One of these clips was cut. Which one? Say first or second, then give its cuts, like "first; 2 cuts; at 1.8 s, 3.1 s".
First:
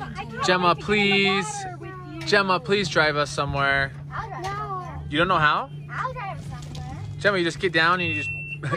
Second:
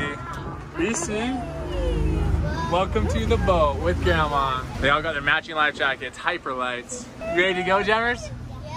second; 2 cuts; at 4.7 s, 7.2 s